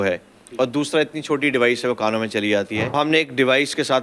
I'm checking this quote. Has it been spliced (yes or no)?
yes